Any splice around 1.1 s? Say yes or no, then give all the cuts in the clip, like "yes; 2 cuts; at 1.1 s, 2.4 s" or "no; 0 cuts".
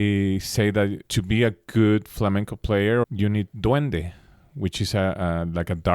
yes; 2 cuts; at 1.1 s, 3.0 s